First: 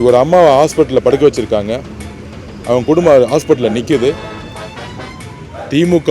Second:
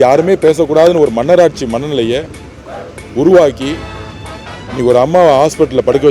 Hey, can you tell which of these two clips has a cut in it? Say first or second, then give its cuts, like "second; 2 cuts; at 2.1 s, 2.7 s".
first; 1 cut; at 4.5 s